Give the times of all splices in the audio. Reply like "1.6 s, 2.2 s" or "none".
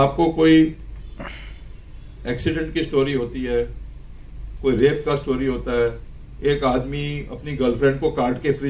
none